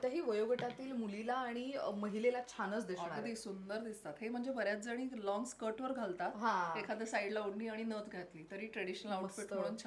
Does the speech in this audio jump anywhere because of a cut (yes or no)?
no